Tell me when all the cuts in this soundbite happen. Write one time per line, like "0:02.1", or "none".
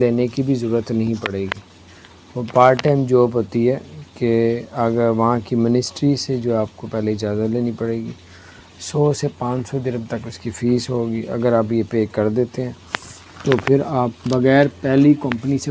none